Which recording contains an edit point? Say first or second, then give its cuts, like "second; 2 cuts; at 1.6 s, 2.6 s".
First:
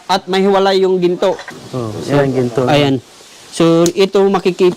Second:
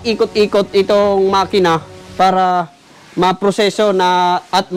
first; 1 cut; at 1.5 s